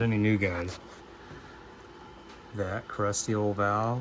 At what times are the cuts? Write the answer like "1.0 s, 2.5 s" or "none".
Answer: none